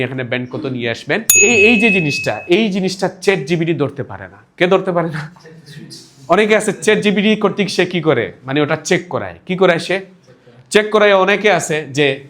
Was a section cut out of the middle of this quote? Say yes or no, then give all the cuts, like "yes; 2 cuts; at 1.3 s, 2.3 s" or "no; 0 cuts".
yes; 1 cut; at 1.4 s